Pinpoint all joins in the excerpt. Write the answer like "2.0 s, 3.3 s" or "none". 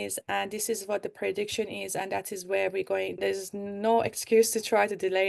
3.2 s